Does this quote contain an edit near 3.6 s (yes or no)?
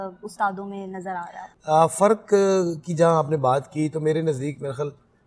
no